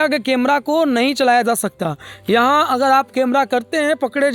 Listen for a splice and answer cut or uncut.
uncut